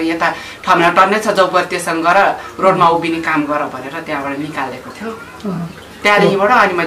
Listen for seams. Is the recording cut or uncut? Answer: uncut